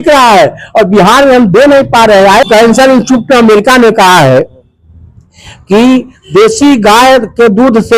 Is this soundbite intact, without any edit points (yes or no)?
no